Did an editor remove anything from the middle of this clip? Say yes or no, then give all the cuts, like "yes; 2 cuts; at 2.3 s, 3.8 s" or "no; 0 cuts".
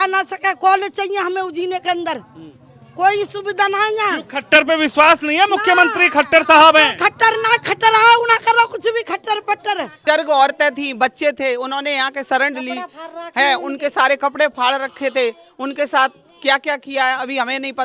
yes; 1 cut; at 9.9 s